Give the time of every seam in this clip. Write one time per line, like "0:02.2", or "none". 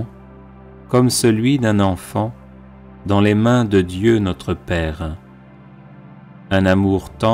none